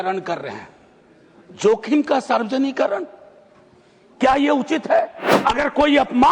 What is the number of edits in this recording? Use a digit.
1